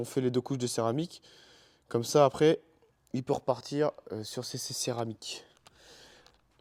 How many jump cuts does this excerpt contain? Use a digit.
0